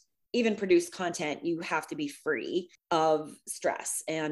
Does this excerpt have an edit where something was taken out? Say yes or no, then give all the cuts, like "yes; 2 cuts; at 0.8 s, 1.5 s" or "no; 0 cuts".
yes; 1 cut; at 2.8 s